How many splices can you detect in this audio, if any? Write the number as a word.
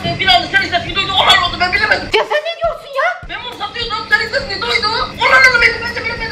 zero